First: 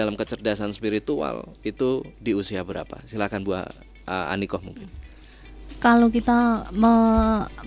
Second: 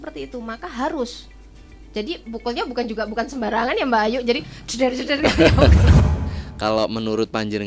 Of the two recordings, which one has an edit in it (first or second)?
second